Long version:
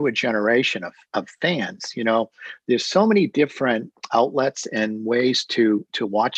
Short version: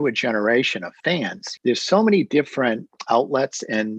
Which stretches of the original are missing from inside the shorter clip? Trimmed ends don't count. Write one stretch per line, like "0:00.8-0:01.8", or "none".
0:01.3-0:02.3

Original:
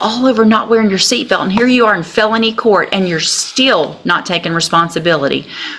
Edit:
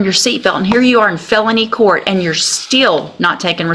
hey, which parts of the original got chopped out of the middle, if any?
none

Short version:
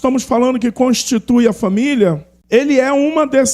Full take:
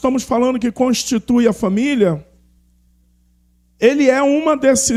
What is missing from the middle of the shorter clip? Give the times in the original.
0:02.3-0:03.6

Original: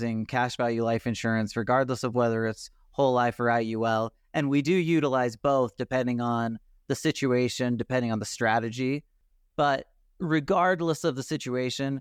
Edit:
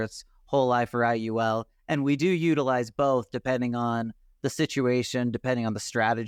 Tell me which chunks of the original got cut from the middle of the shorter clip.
none

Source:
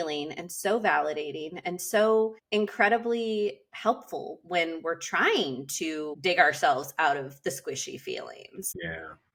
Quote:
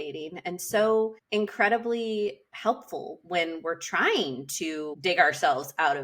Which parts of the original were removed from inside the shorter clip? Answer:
none

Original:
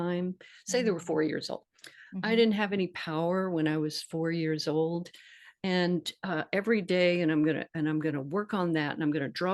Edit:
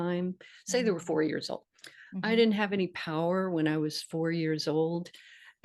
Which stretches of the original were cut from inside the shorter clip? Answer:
none

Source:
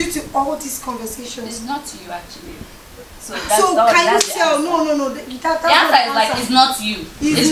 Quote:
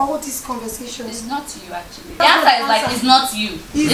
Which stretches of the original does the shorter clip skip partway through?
0:02.5-0:05.6

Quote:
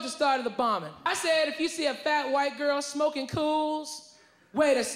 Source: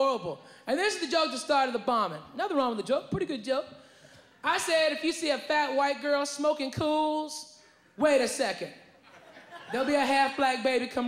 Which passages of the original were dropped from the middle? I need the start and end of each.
0:02.2-0:04.4

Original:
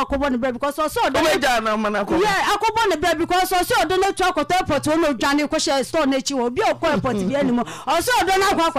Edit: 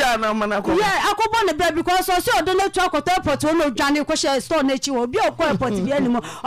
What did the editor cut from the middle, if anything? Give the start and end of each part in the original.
none

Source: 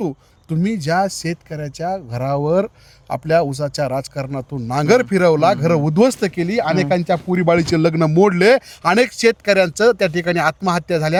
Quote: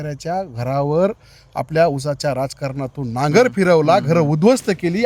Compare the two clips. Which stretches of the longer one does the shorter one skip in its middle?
none

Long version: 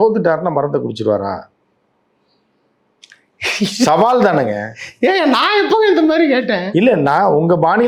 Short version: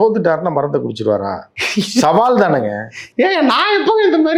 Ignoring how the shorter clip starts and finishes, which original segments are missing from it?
0:01.5-0:03.4

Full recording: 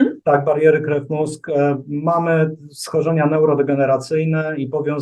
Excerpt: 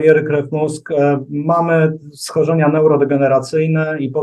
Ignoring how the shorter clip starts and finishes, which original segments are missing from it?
none

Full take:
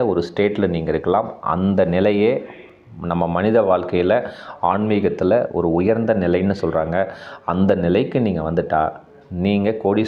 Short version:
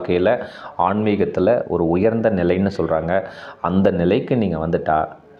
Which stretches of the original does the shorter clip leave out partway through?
none

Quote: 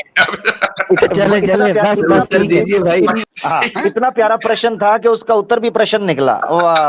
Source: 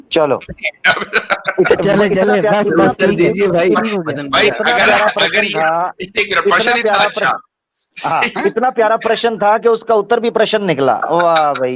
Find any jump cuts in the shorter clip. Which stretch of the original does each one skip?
0:03.9-0:07.9

